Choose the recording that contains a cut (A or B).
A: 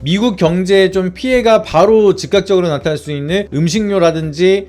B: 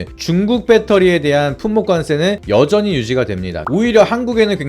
B